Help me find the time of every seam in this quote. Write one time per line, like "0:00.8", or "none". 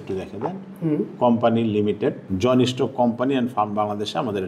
0:02.3